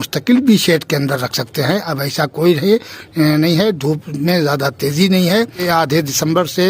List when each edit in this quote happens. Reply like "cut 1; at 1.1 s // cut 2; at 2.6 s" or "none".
cut 1; at 5.7 s